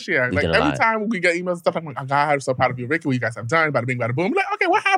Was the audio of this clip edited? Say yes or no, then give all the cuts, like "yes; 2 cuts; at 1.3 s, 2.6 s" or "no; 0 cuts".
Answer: no; 0 cuts